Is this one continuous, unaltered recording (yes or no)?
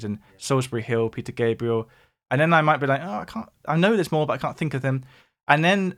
yes